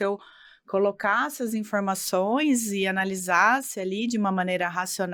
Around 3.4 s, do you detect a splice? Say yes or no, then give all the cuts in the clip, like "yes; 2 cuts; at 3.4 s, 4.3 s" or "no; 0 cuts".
no; 0 cuts